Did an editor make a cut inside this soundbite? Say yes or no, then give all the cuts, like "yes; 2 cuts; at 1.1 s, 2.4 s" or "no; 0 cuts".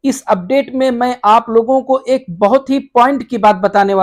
no; 0 cuts